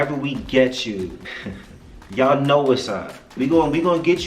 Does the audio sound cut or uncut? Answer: cut